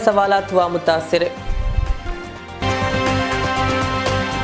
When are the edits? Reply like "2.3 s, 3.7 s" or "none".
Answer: none

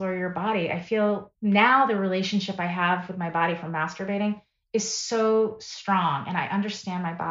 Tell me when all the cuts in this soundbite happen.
1.3 s

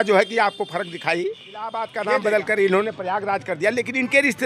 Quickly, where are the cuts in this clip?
1.9 s

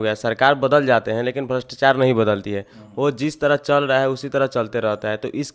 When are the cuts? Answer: none

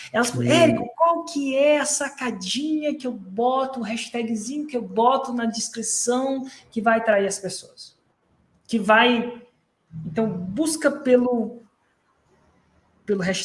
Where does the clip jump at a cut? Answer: none

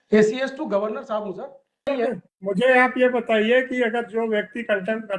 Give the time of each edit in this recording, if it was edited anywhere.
1.9 s

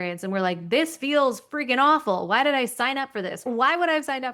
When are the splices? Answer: 3.4 s

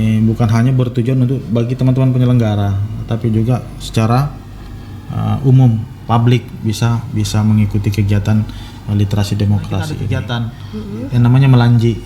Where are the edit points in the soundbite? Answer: 10.1 s

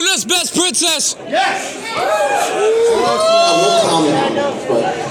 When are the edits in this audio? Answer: none

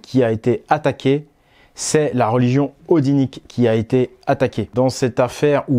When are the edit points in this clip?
4.7 s

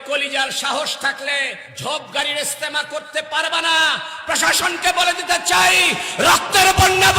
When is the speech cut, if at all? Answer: 1.6 s

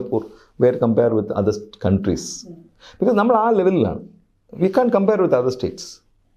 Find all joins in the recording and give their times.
none

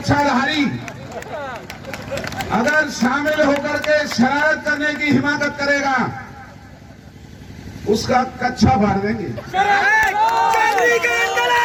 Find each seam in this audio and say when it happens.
none

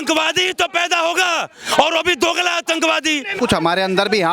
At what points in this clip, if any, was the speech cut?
3.3 s

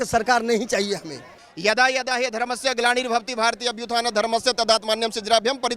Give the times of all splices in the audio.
1.4 s

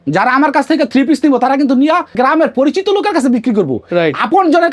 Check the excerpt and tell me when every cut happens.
2.1 s

